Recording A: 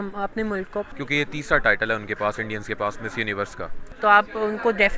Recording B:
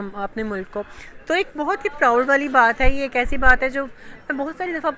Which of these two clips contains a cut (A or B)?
A